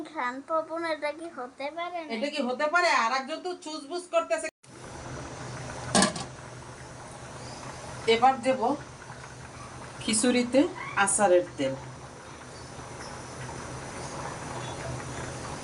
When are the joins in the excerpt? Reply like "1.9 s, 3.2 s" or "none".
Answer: 4.5 s